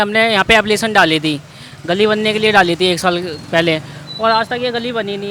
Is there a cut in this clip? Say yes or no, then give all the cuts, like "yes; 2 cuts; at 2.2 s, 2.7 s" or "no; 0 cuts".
no; 0 cuts